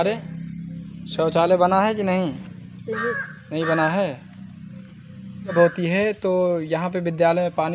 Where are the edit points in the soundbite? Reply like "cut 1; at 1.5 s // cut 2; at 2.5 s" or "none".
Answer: cut 1; at 5.5 s